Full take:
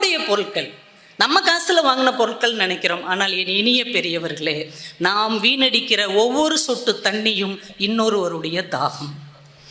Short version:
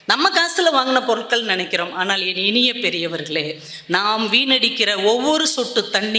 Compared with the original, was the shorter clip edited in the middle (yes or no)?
no